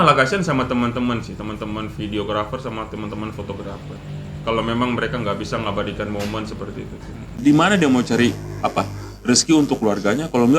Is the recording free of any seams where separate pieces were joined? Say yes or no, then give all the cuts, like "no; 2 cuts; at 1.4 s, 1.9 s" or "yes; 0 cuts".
no; 1 cut; at 7.4 s